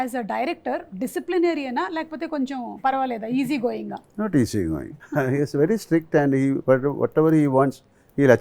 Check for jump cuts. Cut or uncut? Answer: cut